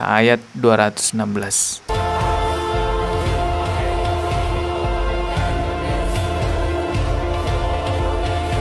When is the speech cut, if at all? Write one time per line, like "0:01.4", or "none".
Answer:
none